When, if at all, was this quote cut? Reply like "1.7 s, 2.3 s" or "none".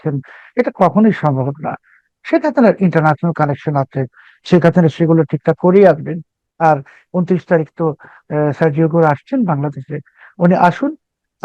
4.4 s